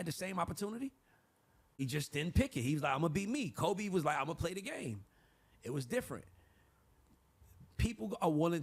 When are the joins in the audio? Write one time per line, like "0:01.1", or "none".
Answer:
0:01.8